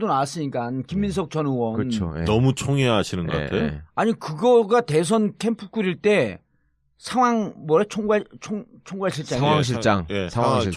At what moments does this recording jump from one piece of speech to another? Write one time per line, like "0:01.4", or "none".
none